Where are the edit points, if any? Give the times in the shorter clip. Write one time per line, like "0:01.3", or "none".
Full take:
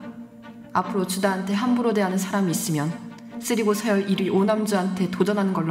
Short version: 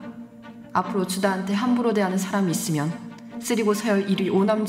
none